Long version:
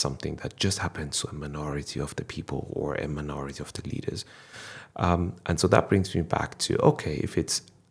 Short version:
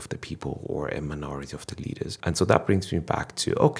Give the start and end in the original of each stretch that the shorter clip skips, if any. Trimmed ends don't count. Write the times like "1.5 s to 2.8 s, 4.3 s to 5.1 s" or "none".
4.2 s to 5.4 s